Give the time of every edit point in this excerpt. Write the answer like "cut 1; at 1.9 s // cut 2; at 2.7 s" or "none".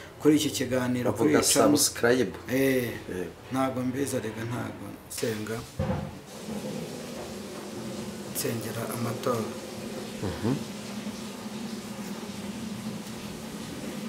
cut 1; at 5.1 s